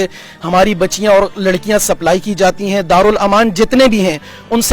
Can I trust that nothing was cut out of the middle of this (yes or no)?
yes